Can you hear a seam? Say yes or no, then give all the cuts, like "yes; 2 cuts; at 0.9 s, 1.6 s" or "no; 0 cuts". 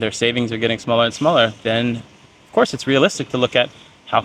no; 0 cuts